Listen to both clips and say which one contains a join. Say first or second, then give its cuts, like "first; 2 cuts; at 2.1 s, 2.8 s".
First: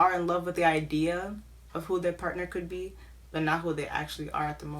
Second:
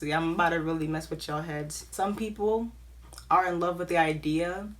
second; 1 cut; at 1.8 s